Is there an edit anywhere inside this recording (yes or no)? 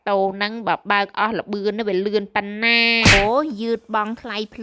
yes